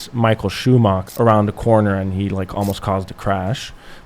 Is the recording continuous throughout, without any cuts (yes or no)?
no